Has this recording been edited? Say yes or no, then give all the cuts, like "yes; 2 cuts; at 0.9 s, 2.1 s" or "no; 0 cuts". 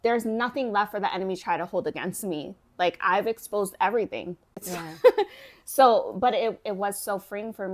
yes; 1 cut; at 4.5 s